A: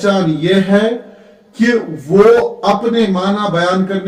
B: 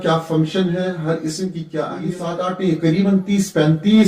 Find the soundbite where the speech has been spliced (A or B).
B